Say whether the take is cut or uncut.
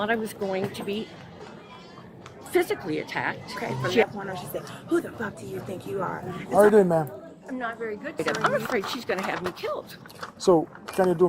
cut